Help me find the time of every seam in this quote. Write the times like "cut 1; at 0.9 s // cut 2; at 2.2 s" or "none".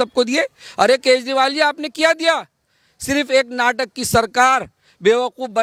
none

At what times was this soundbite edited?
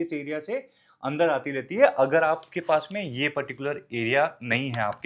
none

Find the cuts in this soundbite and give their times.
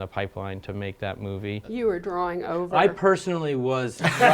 cut 1; at 1.6 s

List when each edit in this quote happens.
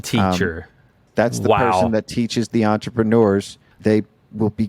cut 1; at 1.0 s // cut 2; at 3.7 s

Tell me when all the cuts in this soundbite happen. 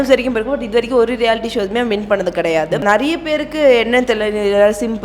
cut 1; at 2.8 s

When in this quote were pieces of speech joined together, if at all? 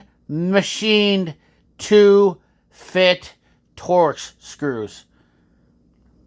none

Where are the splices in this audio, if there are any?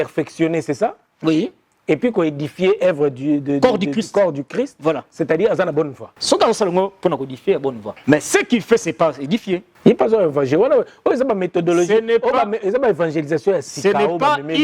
cut 1; at 6.1 s // cut 2; at 7.9 s // cut 3; at 9.7 s

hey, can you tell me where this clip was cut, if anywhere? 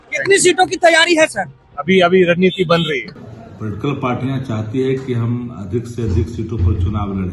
cut 1; at 3.1 s

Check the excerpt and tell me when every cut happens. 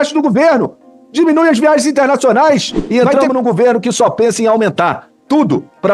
cut 1; at 2.8 s

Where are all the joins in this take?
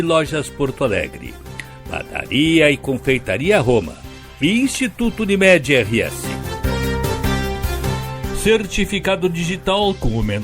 cut 1; at 6.2 s // cut 2; at 8.1 s

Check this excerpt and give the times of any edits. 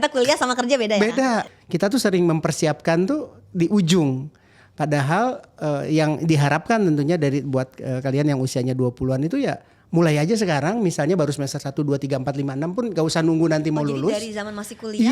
cut 1; at 1.5 s

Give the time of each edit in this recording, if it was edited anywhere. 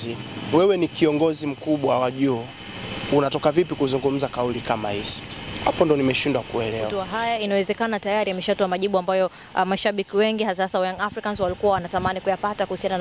cut 1; at 7.0 s

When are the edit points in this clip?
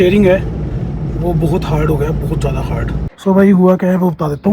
cut 1; at 3.1 s

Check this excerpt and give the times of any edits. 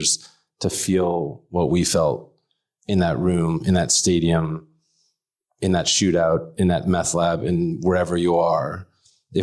none

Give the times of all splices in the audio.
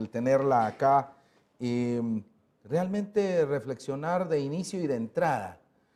none

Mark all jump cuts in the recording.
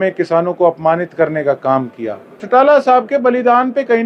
cut 1; at 2.4 s

